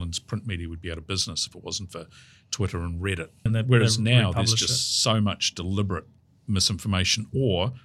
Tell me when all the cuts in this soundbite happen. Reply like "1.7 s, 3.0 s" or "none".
3.5 s

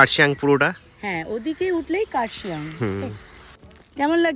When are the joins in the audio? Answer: none

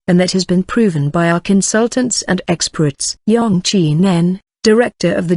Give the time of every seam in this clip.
2.8 s

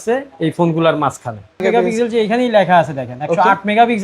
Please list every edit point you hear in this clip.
1.6 s

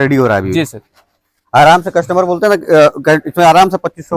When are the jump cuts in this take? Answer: none

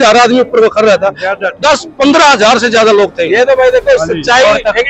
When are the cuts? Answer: none

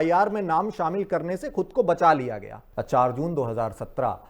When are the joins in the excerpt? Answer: 2.6 s

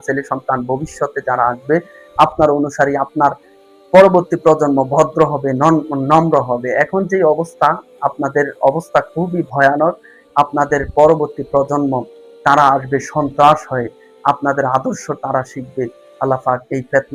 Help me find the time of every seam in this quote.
none

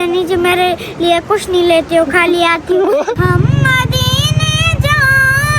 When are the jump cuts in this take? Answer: 3.2 s

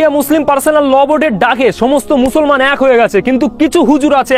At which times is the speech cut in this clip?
none

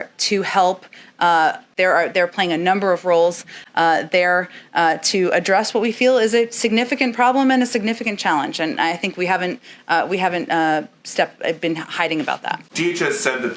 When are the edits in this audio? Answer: 1.7 s, 12.7 s

